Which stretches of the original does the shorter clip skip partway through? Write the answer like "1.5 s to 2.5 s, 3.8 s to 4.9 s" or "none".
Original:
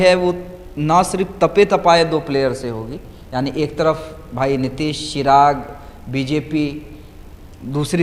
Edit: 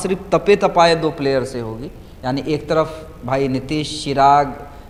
none